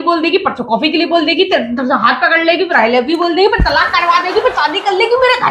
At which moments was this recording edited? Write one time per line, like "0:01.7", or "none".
none